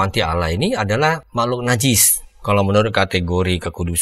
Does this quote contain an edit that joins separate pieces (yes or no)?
yes